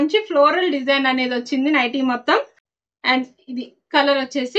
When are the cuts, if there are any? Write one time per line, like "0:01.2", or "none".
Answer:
0:02.6